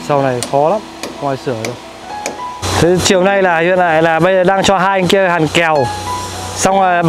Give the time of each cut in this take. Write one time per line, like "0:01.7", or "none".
0:02.6